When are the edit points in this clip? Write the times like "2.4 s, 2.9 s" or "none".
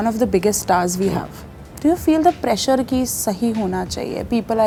none

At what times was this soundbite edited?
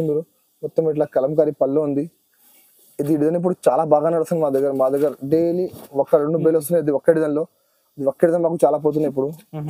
none

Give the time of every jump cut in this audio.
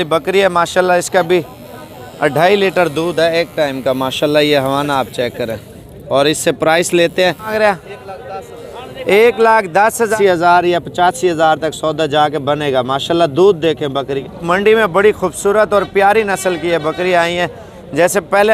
7.5 s, 10.1 s, 14.3 s

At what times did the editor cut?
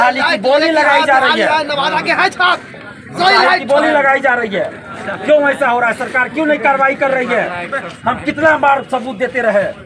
none

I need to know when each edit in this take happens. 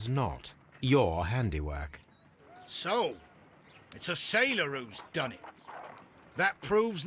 none

